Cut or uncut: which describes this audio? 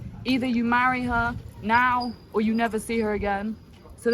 uncut